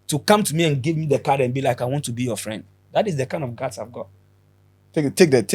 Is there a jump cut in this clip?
no; 0 cuts

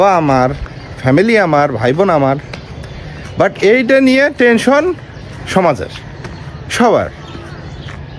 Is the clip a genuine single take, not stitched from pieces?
yes; 0 cuts

